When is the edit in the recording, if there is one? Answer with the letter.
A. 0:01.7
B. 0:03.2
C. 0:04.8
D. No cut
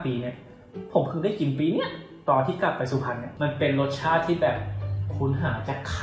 B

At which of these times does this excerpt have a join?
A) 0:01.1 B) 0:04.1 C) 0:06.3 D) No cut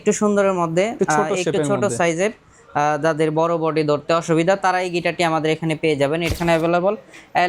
C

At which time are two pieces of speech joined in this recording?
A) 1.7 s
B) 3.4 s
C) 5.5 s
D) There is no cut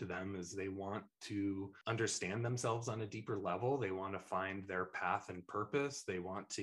A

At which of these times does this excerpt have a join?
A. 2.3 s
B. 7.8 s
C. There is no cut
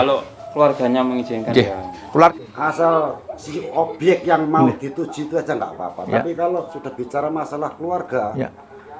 A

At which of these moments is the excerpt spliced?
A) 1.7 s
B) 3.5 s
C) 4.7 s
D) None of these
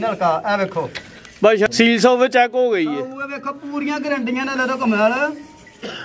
A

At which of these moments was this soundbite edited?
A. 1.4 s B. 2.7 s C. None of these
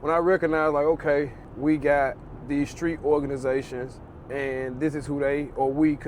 A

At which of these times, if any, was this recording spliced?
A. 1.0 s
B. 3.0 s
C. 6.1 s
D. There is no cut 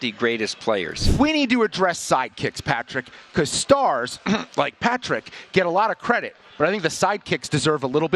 A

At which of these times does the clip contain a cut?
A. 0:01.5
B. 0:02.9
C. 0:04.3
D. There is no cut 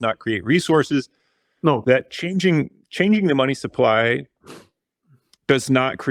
D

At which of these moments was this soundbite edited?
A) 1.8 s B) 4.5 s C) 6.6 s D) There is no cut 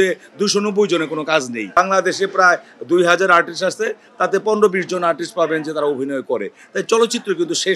A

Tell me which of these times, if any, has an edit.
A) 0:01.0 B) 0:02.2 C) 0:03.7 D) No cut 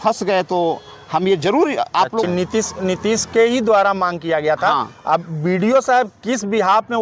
B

